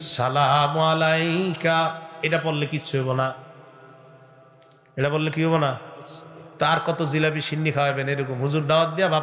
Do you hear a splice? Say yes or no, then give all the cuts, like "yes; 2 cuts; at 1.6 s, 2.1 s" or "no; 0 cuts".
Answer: no; 0 cuts